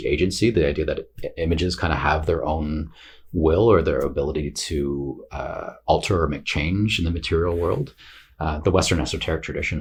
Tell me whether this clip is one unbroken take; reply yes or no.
yes